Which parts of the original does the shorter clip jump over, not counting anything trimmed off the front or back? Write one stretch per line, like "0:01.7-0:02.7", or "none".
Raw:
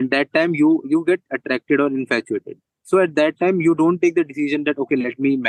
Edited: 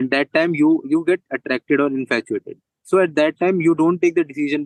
none